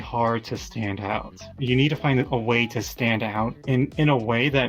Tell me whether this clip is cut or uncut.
cut